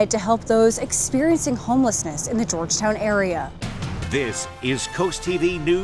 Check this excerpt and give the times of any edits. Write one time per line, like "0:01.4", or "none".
0:03.6